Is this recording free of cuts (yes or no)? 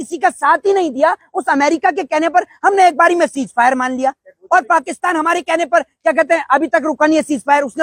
yes